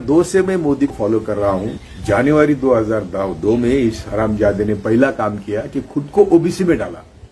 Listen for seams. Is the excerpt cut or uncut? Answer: cut